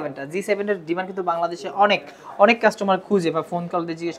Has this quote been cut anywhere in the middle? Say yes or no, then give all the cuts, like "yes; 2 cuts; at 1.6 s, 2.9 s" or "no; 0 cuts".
no; 0 cuts